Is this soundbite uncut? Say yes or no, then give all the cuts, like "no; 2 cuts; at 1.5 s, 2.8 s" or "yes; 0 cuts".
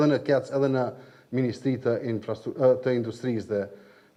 yes; 0 cuts